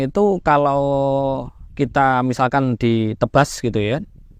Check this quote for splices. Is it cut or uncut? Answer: uncut